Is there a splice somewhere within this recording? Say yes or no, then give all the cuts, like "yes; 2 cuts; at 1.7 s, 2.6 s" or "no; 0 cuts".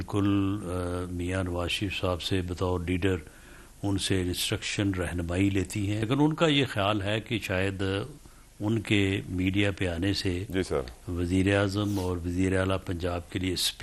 yes; 1 cut; at 6.0 s